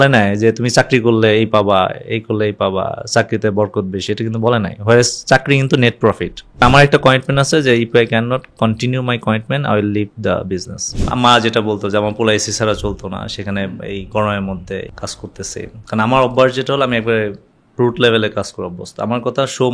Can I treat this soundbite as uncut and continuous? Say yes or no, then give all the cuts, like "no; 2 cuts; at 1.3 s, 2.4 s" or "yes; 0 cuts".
no; 3 cuts; at 6.6 s, 11.0 s, 14.9 s